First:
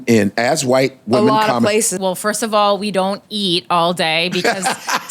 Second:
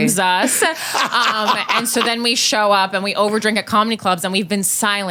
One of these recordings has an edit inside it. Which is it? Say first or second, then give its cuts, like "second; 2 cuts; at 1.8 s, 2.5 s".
first; 1 cut; at 1.9 s